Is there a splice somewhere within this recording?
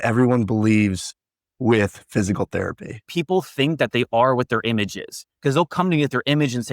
yes; 1 cut; at 3.1 s

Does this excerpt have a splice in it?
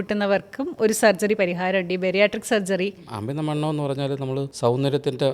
yes; 2 cuts; at 3.1 s, 4.5 s

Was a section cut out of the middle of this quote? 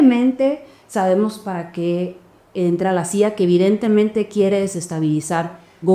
no; 0 cuts

